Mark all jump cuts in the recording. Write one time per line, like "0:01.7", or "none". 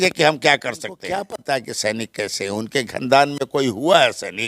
0:01.0